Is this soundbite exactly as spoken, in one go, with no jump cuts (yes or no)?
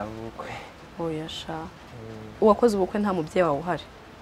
no